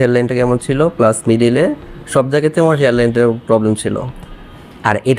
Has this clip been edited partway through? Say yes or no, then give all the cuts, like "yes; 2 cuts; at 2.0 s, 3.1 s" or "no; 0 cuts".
no; 0 cuts